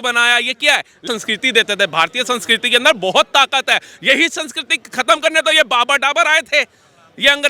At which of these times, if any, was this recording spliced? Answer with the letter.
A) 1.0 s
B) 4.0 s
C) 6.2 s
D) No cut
A